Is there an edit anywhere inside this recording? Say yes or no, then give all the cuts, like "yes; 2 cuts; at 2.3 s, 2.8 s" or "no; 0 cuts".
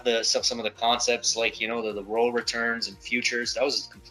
no; 0 cuts